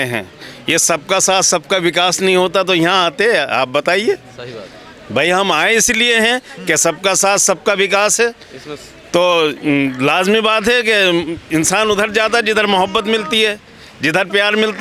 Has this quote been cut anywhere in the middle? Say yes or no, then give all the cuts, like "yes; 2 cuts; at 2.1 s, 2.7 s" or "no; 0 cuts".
no; 0 cuts